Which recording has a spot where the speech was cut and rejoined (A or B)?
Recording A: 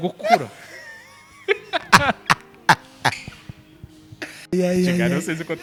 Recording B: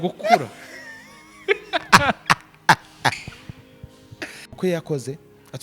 B